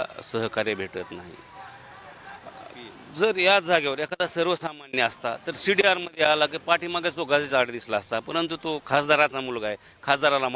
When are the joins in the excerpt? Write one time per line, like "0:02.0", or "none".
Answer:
none